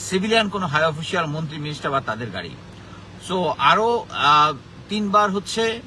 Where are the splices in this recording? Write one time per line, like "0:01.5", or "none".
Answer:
none